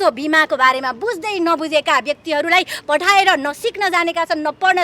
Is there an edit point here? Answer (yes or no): no